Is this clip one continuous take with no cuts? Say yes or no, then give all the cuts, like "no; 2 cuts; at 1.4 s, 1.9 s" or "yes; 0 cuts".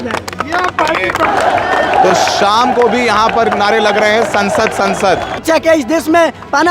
no; 2 cuts; at 1.2 s, 5.3 s